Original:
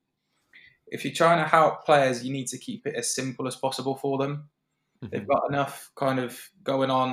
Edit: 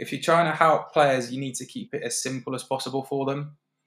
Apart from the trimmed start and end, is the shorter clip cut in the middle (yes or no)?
no